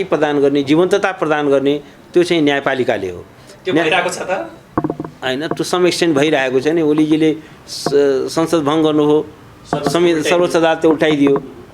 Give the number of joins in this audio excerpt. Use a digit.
0